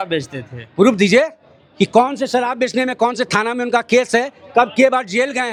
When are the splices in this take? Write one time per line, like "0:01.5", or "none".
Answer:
none